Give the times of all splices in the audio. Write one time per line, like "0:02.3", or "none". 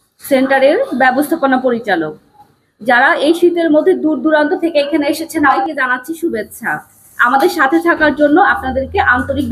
0:05.6